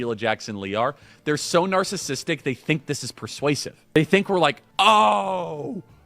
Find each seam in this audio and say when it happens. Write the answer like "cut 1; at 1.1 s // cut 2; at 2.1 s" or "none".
cut 1; at 4.0 s // cut 2; at 4.6 s